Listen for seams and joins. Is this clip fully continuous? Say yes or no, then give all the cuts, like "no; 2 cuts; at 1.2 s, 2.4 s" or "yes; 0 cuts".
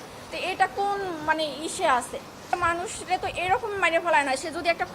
no; 1 cut; at 2.4 s